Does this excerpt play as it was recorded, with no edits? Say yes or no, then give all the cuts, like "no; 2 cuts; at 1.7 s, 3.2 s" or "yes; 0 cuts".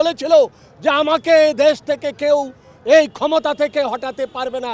yes; 0 cuts